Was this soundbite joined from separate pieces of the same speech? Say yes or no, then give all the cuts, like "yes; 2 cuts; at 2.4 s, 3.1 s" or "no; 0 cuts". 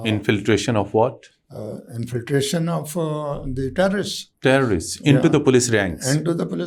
no; 0 cuts